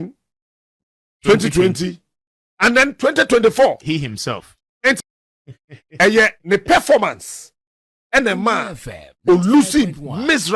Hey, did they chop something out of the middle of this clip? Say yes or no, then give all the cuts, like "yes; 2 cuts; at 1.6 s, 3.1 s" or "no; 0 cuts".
yes; 1 cut; at 5.0 s